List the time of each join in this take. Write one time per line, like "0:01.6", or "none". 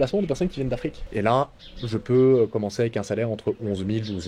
0:01.0

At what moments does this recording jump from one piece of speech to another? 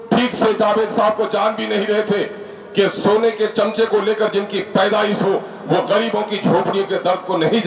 none

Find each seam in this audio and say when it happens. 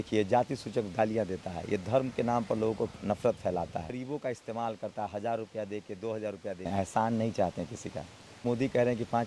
0:03.9
0:06.7
0:08.4

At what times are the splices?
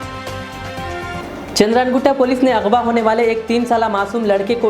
0:01.1

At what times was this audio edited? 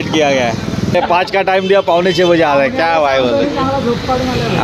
0:01.0

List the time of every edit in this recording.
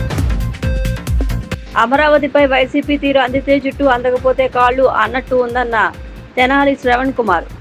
0:01.2

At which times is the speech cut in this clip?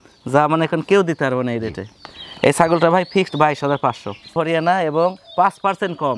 none

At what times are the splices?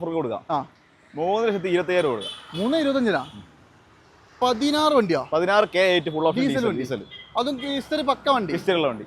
none

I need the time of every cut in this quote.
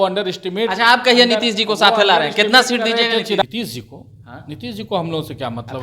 0:03.4

